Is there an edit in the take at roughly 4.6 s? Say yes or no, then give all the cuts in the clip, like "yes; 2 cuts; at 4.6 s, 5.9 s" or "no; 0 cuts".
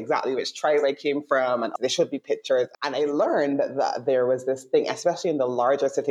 no; 2 cuts; at 1.7 s, 2.7 s